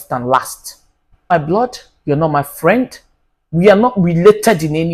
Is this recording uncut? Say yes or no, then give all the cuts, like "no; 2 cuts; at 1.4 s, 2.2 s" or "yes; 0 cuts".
no; 1 cut; at 1.3 s